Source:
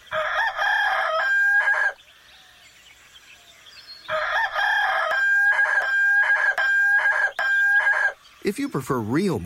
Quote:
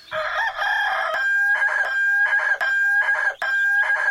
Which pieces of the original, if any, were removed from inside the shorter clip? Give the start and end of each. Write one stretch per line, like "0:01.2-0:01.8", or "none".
0:01.1-0:05.1